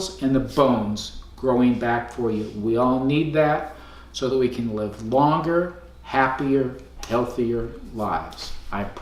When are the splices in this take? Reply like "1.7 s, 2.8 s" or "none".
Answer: none

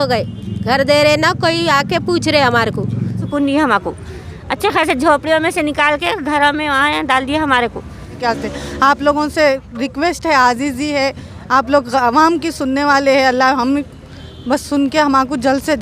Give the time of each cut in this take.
3.2 s, 8.2 s

